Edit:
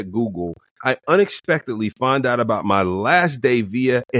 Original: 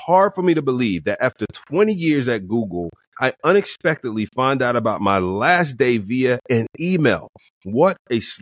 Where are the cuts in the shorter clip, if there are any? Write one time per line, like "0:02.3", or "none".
none